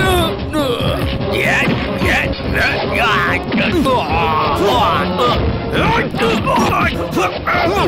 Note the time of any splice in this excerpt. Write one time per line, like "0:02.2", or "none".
0:06.7